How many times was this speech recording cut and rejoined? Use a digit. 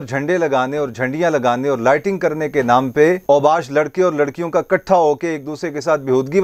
0